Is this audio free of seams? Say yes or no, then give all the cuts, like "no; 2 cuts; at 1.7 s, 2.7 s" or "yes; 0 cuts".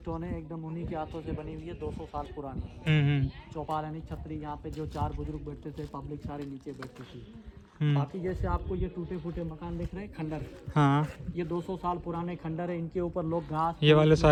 yes; 0 cuts